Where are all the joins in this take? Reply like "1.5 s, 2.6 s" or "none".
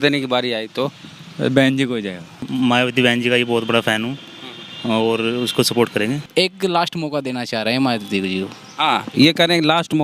2.4 s, 6.2 s